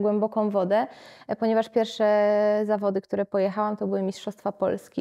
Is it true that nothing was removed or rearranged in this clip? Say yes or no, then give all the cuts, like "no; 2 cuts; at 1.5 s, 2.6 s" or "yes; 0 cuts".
yes; 0 cuts